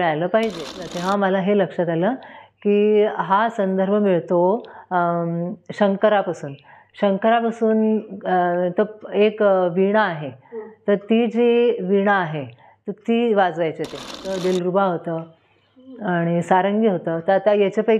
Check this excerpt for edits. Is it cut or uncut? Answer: cut